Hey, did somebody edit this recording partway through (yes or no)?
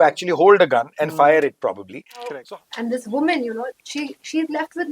yes